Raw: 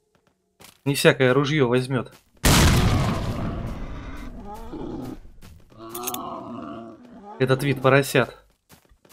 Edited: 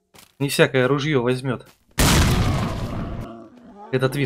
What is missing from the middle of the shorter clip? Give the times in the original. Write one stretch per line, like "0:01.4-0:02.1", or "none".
0:03.7-0:06.8